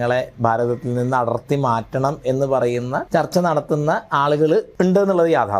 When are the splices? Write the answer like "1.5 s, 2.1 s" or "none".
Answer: 3.0 s, 4.7 s